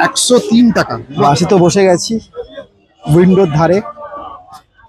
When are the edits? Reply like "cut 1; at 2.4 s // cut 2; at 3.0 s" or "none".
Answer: cut 1; at 1.2 s